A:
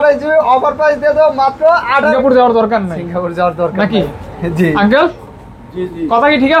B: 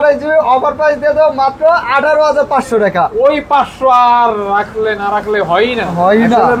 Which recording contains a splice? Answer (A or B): A